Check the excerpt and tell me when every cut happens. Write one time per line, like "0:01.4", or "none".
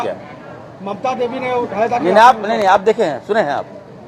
none